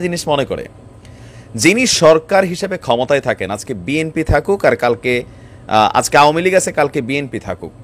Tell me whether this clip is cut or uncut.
uncut